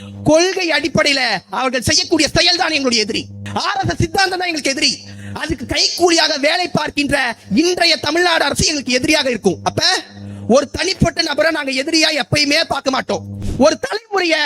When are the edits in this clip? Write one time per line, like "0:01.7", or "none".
0:03.4
0:13.4